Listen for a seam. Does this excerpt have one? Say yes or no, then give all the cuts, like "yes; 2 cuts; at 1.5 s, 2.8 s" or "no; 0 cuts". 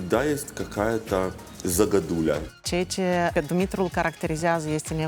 yes; 3 cuts; at 1.5 s, 2.5 s, 3.3 s